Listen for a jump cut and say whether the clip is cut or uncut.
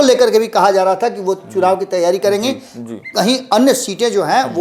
uncut